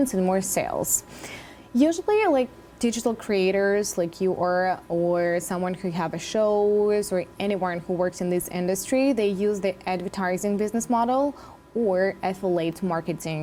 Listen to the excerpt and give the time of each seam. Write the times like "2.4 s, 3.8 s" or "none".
none